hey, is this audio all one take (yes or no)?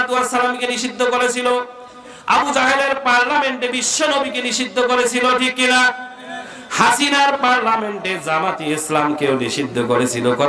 yes